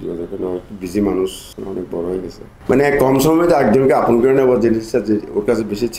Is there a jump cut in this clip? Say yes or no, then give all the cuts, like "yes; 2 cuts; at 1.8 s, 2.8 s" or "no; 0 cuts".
yes; 2 cuts; at 1.5 s, 2.5 s